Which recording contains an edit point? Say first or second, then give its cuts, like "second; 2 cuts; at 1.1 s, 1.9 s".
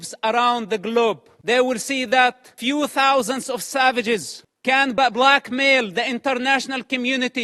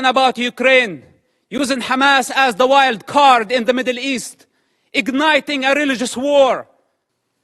first; 3 cuts; at 1.3 s, 2.5 s, 5.0 s